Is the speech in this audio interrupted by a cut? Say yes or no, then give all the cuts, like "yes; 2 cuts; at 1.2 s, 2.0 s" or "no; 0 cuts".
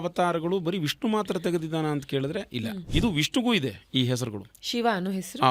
yes; 1 cut; at 2.8 s